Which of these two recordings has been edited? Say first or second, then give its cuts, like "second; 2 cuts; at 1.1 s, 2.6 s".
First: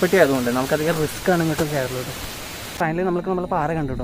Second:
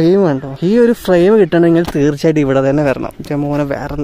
first; 1 cut; at 2.7 s